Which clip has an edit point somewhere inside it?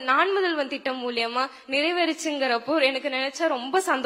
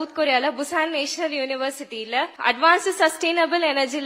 second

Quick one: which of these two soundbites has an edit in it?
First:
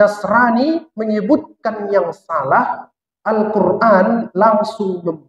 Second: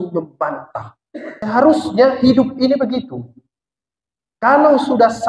second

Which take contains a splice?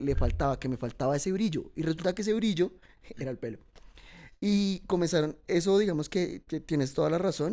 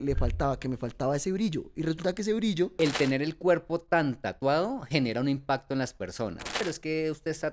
second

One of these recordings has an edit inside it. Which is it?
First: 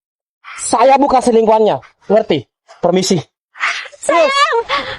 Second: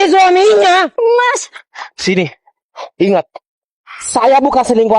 second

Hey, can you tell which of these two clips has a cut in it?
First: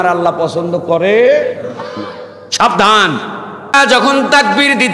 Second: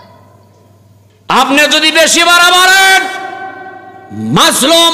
first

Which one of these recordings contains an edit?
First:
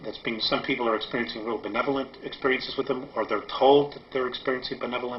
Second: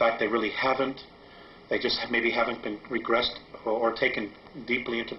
second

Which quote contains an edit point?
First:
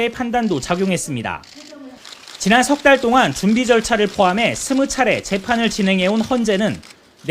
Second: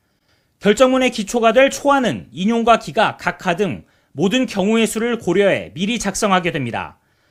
first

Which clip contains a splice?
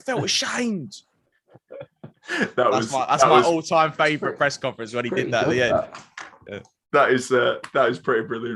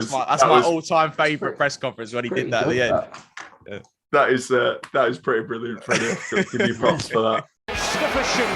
second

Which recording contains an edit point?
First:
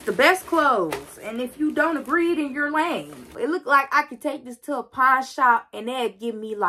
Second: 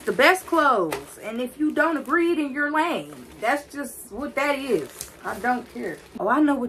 first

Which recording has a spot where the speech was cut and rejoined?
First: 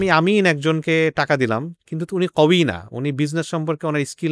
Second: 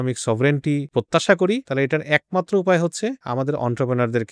second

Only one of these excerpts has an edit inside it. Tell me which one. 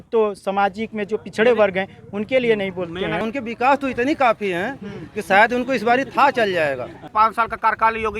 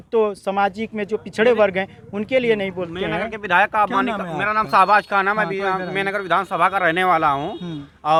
first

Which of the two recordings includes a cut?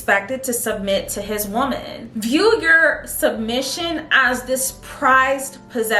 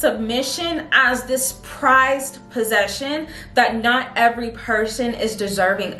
first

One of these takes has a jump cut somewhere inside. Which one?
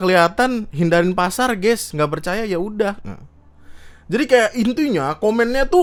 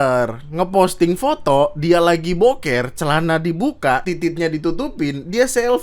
second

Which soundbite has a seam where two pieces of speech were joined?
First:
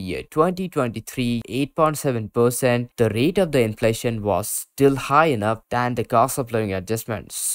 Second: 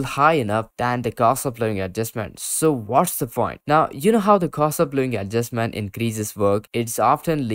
first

